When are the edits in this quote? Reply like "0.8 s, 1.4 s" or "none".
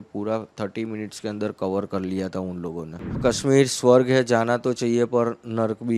3.2 s